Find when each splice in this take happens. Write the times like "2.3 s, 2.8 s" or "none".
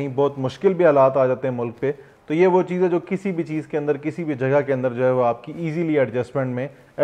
none